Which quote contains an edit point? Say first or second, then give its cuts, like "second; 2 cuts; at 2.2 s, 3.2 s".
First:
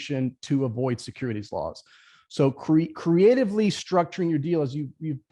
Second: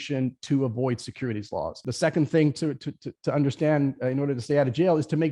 second; 1 cut; at 1.8 s